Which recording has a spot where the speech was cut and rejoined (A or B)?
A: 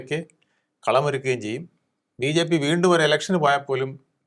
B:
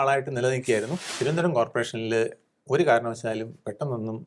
B